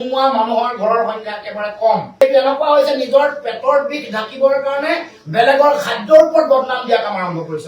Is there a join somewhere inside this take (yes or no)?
yes